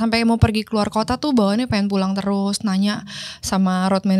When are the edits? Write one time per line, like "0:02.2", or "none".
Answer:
none

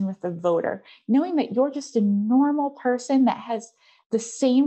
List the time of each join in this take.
none

